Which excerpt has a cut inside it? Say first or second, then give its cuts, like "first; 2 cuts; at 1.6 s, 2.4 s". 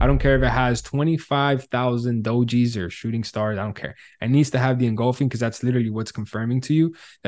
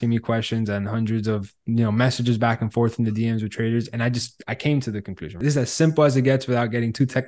second; 1 cut; at 5.4 s